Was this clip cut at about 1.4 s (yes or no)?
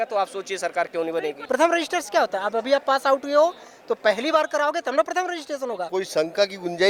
yes